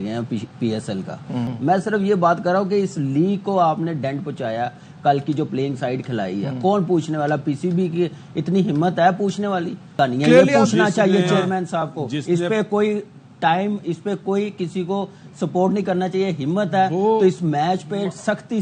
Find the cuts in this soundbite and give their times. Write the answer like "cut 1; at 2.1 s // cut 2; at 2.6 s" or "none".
cut 1; at 1.5 s // cut 2; at 9.9 s